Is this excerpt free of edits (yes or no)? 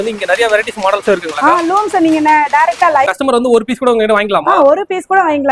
no